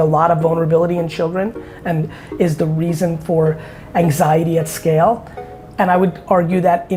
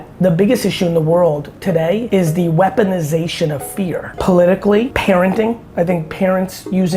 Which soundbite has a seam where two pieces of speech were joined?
second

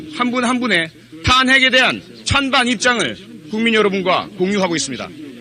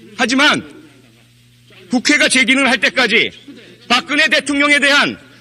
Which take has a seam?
second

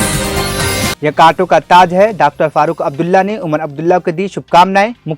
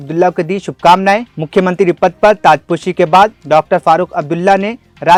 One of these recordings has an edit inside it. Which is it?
first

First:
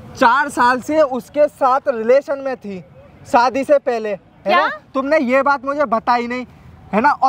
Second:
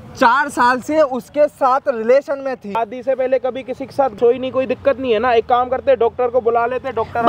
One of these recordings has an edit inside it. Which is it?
second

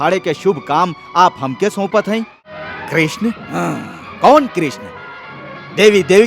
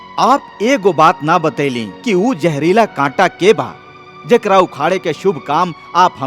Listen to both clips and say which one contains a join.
first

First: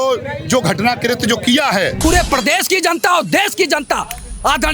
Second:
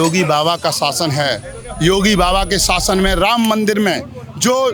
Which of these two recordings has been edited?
first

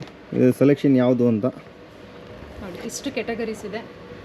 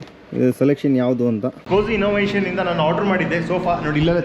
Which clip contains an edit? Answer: second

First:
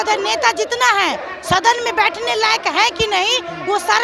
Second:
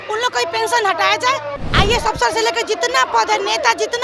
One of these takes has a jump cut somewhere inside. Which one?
second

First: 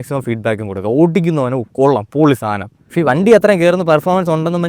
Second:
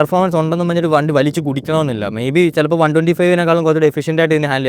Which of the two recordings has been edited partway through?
first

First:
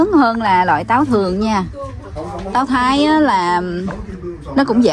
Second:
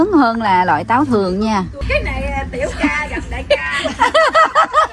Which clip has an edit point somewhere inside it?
second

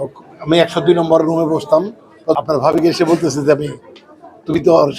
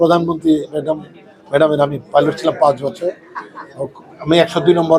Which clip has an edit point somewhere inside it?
first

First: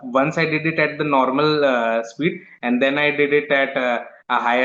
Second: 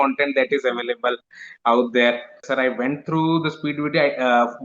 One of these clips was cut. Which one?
second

